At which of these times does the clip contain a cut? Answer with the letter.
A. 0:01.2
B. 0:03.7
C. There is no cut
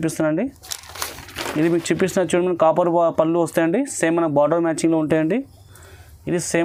C